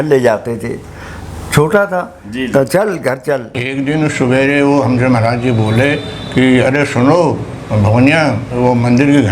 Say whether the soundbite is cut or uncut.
cut